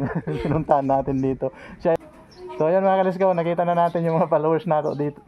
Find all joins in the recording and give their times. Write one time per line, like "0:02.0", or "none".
0:02.0